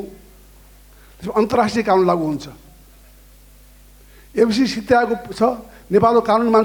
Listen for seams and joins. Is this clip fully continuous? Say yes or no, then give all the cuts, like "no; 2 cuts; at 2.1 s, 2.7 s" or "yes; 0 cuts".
yes; 0 cuts